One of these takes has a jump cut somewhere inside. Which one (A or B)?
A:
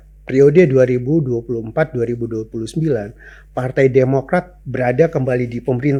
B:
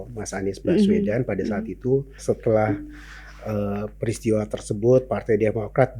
B